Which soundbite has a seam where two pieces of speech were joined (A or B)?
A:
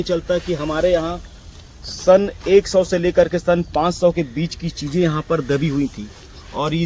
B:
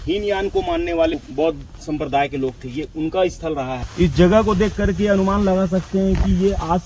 B